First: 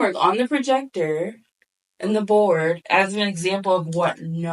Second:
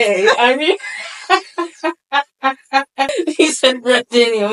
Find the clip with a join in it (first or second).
second